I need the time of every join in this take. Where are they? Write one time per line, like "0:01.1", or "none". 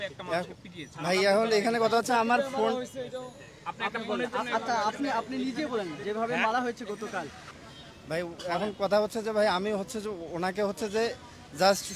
0:07.4